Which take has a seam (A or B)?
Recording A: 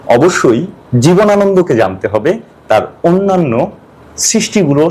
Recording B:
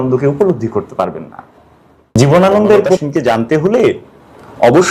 B